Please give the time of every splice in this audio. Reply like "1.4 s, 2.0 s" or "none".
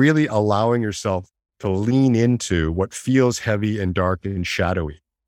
none